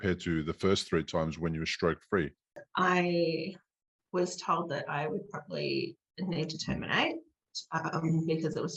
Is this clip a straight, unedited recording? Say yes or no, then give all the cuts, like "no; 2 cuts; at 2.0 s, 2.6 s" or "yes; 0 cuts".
no; 1 cut; at 2.6 s